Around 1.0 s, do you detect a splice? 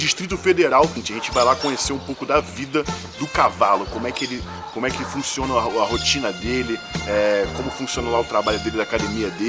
yes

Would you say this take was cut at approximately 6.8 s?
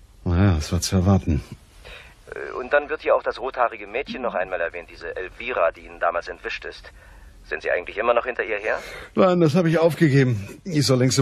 no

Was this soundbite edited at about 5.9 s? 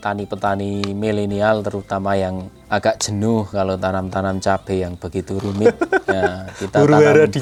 no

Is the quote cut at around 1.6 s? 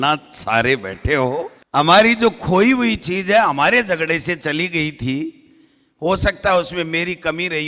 yes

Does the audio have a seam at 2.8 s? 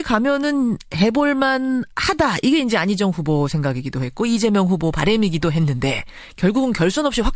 no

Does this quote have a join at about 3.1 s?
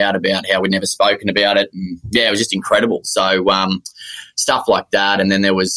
no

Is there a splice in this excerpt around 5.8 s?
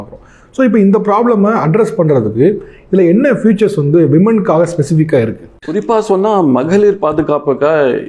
yes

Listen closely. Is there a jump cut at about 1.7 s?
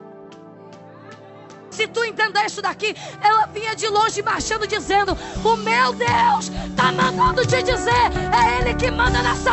yes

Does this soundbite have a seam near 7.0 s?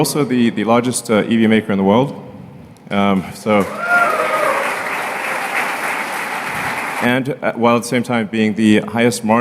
yes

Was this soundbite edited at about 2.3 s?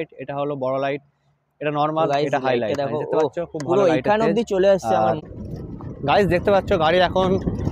no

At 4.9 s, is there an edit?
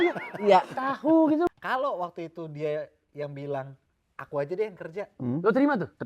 no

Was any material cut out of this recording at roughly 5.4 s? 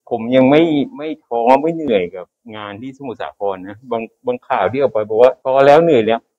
yes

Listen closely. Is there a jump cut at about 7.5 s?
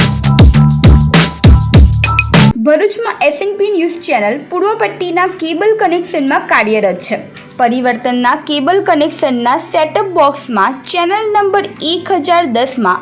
no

